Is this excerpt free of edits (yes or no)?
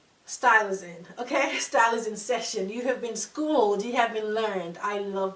yes